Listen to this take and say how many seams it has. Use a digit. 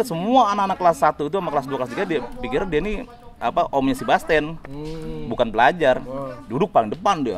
0